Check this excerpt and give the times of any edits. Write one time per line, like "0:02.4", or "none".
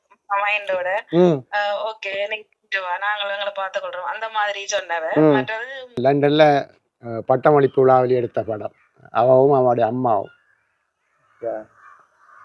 0:06.0

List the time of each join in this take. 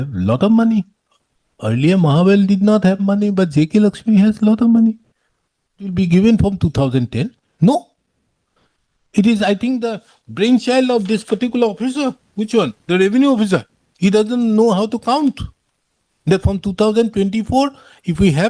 0:05.9

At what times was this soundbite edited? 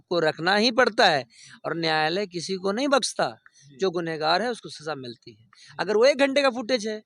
none

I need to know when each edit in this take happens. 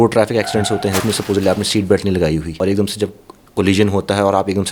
0:01.0
0:02.5

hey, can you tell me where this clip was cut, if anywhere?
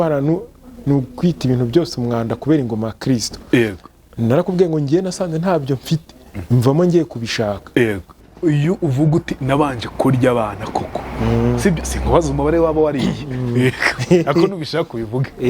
0:08.3

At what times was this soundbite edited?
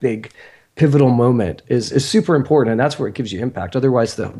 none

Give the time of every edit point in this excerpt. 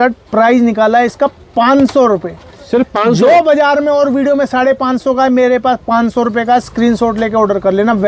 none

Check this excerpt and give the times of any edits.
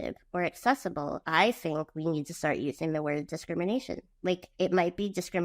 0:01.2
0:04.5

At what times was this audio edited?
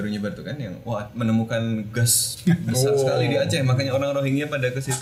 none

